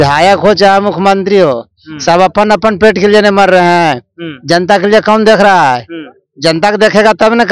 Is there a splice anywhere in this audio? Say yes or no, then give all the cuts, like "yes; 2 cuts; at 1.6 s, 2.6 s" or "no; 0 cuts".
no; 0 cuts